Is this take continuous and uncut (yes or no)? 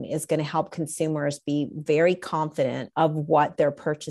no